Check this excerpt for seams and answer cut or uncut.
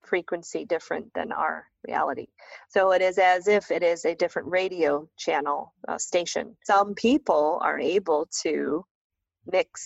cut